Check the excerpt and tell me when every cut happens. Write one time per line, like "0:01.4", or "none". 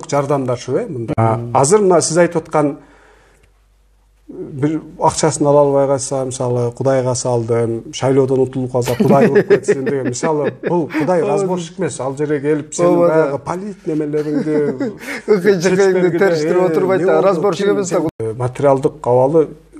0:01.2
0:18.1